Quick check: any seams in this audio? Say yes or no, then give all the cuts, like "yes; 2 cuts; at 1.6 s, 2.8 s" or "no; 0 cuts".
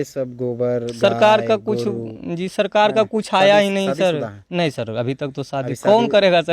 no; 0 cuts